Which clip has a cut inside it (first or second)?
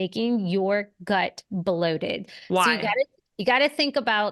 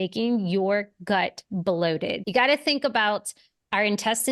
second